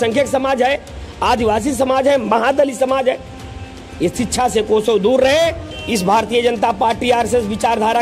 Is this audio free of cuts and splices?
no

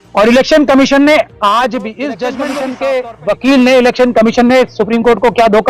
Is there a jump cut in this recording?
yes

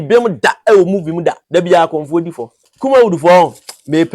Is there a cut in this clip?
yes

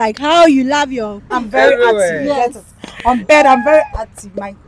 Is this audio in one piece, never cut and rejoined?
no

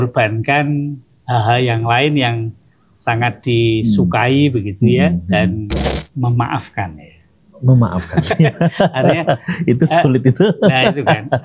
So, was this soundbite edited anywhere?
yes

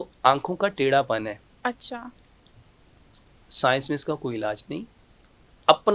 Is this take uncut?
yes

